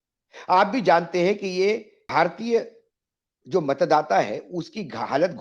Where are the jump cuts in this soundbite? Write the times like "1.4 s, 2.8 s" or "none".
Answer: 2.0 s